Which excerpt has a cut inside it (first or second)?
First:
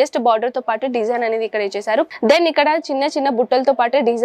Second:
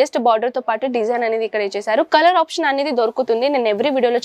first